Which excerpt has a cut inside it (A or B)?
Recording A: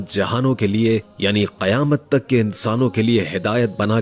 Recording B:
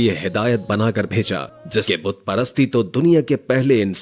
B